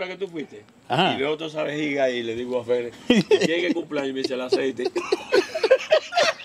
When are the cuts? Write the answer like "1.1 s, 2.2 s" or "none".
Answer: none